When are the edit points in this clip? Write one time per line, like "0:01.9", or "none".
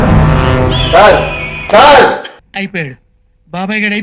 none